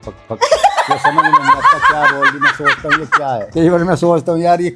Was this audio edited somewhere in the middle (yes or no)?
no